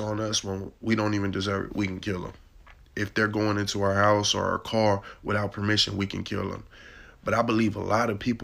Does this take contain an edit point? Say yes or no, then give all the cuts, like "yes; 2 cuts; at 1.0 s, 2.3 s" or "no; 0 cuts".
no; 0 cuts